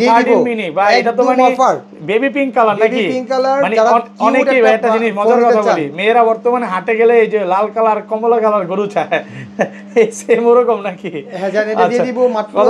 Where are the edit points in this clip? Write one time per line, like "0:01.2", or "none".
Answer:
none